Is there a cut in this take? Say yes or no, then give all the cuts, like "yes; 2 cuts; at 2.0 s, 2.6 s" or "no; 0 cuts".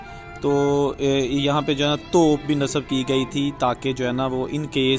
no; 0 cuts